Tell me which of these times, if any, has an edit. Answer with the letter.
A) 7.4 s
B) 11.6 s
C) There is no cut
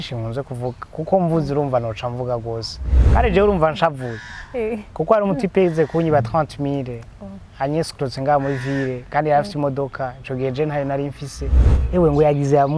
B